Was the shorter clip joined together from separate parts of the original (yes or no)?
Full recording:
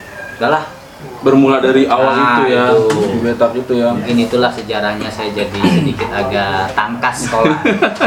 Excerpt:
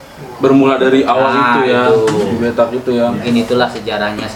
no